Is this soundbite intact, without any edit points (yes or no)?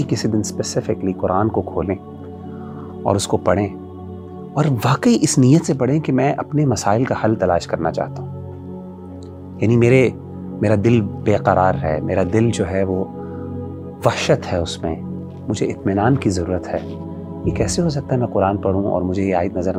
yes